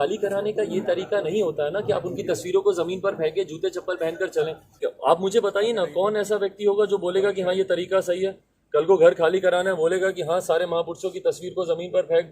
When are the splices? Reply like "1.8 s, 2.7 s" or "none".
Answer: 4.8 s